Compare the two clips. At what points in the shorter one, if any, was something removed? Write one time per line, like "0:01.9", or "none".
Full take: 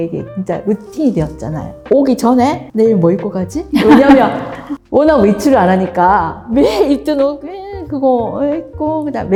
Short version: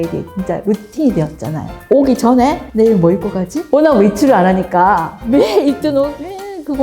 0:03.5

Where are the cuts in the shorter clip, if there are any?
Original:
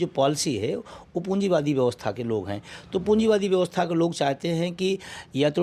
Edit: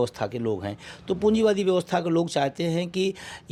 none

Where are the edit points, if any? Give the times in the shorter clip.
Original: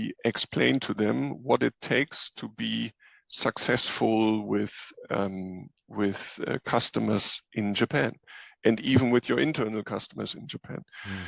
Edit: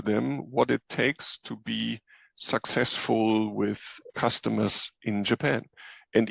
0:04.1

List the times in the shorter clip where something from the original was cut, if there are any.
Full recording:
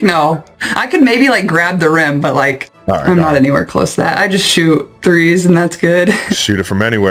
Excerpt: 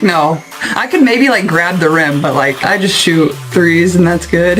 0:02.6

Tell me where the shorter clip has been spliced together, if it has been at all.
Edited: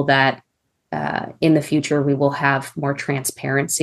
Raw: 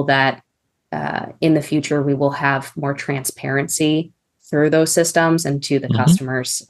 none

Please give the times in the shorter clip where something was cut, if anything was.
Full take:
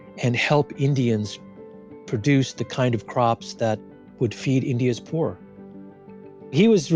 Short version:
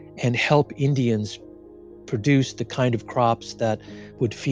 none

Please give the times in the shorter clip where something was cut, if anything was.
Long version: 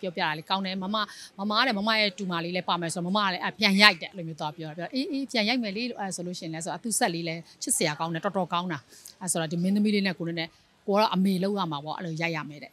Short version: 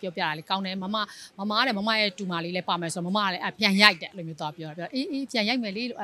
none

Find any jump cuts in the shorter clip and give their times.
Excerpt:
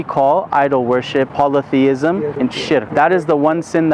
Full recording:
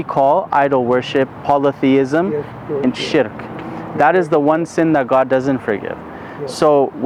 0:01.3
0:02.5

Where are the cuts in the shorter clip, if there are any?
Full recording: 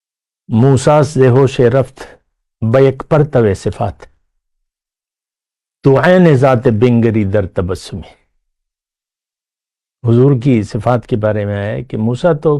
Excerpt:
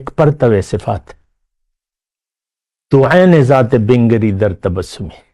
none

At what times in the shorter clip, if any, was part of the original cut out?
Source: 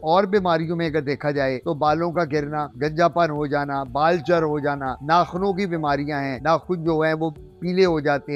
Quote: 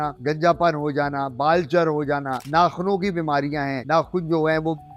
none

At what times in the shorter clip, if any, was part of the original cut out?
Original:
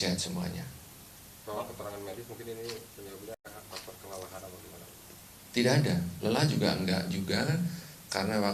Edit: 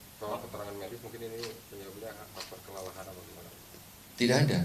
0:02.1

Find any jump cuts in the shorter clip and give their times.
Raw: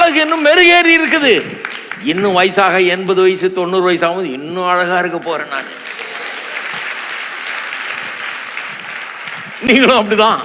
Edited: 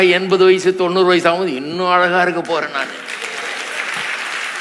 none

